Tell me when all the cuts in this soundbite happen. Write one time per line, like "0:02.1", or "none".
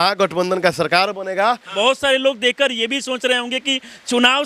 0:01.7